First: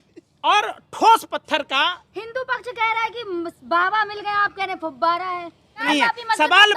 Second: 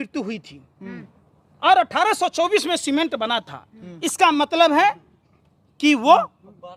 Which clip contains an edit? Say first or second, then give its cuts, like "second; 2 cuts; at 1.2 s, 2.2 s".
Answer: first; 1 cut; at 5.8 s